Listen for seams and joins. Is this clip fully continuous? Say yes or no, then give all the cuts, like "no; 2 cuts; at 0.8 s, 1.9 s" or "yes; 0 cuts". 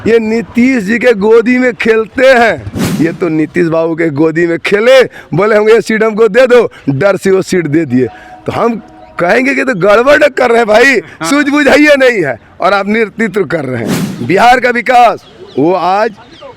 no; 2 cuts; at 2.8 s, 14.0 s